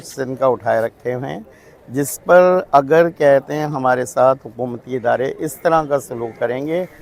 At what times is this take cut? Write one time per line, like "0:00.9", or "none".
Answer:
none